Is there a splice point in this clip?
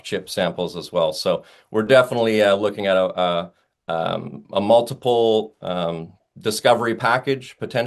no; 0 cuts

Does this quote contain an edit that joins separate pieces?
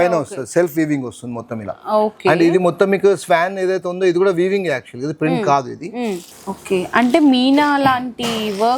no; 0 cuts

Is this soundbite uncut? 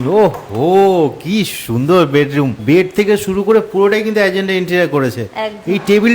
yes; 0 cuts

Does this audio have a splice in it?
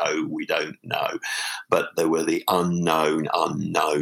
no; 0 cuts

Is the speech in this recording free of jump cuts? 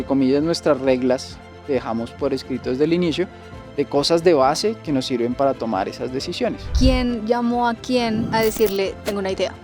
no; 2 cuts; at 6.7 s, 8.3 s

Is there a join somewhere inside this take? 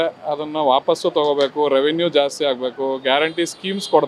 no; 0 cuts

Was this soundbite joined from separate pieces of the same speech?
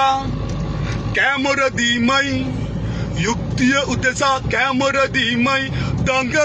no; 0 cuts

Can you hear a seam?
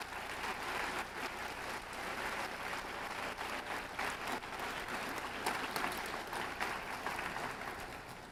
no; 0 cuts

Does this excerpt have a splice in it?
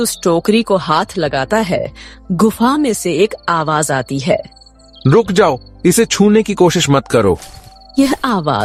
no; 0 cuts

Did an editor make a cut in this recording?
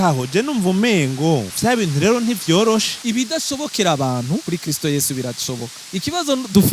yes; 4 cuts; at 1.5 s, 2.9 s, 4.4 s, 5.7 s

